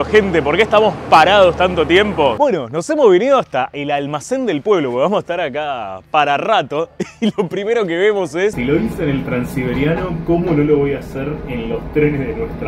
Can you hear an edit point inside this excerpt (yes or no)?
yes